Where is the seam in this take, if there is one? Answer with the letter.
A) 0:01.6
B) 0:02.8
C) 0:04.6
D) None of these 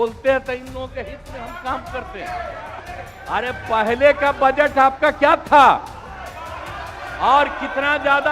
B